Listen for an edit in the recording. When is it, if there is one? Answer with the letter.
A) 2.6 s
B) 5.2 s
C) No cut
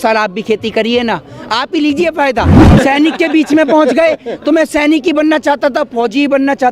A